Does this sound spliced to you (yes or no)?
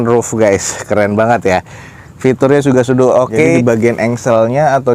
yes